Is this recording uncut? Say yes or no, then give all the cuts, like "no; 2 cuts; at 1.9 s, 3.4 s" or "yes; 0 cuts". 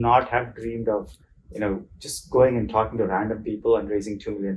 yes; 0 cuts